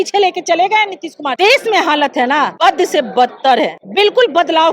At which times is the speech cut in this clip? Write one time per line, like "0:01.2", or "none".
0:01.3
0:02.5
0:03.8